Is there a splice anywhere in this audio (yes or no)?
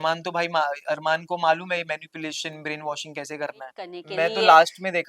yes